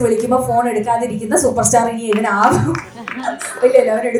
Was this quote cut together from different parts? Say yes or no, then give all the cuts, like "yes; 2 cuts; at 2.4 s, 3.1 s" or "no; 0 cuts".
no; 0 cuts